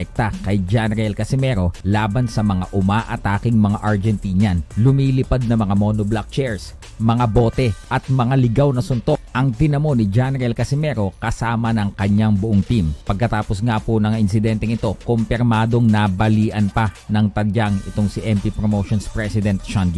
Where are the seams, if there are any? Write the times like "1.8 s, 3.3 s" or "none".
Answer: 1.8 s, 4.7 s, 7.8 s, 9.3 s, 13.0 s, 14.0 s